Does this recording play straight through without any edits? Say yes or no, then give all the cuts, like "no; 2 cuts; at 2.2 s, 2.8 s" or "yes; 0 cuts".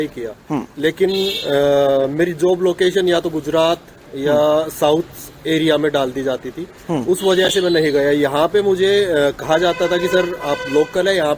yes; 0 cuts